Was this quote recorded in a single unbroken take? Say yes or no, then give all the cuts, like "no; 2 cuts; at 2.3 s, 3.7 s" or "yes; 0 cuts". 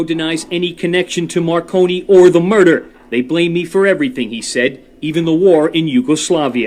yes; 0 cuts